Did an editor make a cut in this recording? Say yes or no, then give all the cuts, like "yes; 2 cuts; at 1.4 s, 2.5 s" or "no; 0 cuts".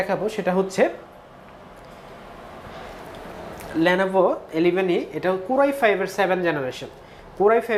no; 0 cuts